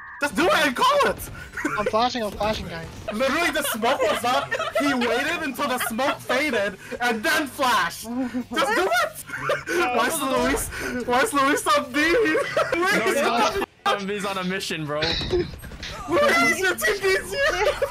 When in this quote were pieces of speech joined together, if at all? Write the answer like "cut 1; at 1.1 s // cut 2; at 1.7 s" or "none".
cut 1; at 3.1 s // cut 2; at 9.3 s // cut 3; at 12.7 s